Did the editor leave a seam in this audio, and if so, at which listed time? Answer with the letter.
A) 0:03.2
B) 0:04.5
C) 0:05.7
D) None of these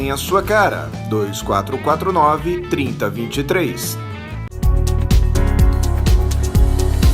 B